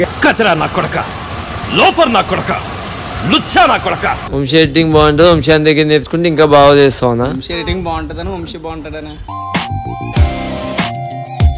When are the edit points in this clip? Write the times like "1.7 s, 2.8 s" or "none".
4.2 s